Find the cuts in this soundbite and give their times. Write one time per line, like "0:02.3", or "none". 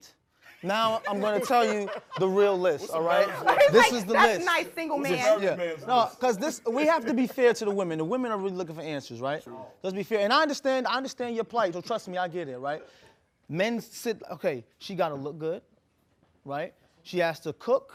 none